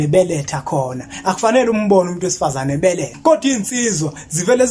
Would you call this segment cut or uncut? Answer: cut